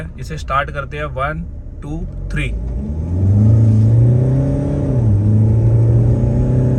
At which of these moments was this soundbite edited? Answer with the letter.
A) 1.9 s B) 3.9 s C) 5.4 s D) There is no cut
D